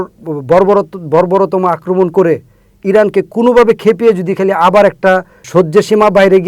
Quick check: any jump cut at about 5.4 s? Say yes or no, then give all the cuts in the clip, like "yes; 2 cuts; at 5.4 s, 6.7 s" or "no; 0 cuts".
yes; 1 cut; at 5.4 s